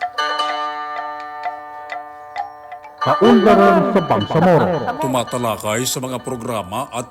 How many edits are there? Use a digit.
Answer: 1